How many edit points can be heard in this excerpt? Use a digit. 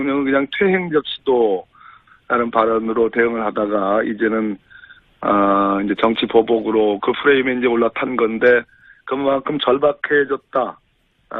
1